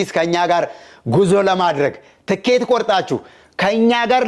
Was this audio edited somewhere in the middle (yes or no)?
no